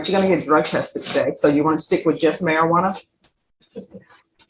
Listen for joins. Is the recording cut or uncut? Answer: uncut